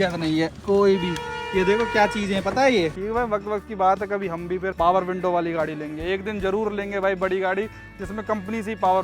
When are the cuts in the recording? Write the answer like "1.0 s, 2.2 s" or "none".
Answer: 3.0 s, 4.7 s